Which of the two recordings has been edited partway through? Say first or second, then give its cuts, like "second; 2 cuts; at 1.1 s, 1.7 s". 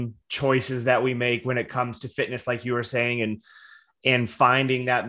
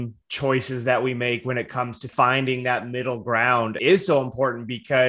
second; 2 cuts; at 2.1 s, 3.8 s